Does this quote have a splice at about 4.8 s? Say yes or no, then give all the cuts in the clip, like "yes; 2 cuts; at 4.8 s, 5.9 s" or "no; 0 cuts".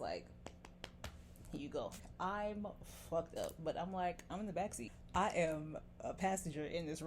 yes; 2 cuts; at 2.0 s, 4.8 s